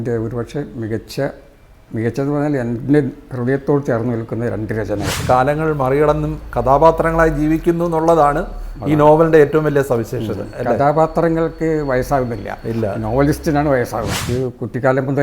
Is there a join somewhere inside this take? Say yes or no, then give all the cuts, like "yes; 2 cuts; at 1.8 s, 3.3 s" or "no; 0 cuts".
yes; 2 cuts; at 5.2 s, 14.2 s